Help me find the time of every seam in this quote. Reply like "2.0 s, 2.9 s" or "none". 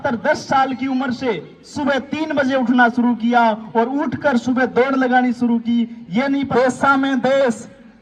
6.5 s